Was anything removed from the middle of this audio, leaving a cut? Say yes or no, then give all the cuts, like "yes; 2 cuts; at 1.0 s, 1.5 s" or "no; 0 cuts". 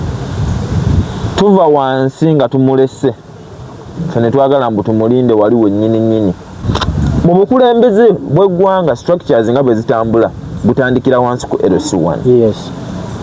yes; 1 cut; at 6.6 s